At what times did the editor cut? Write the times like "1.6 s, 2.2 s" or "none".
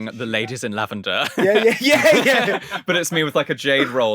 1.4 s

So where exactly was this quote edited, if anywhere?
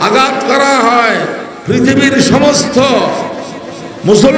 1.5 s

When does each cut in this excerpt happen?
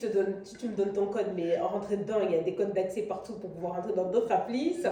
none

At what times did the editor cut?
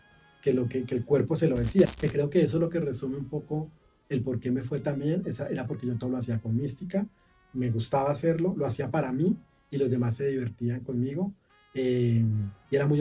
1.9 s

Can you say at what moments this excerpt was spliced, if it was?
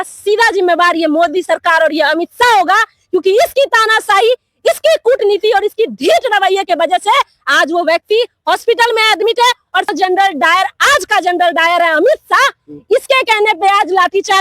9.9 s

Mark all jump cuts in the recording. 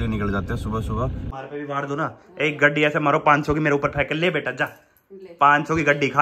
1.3 s

